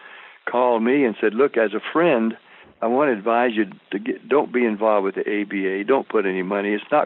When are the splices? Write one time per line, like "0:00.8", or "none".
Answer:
none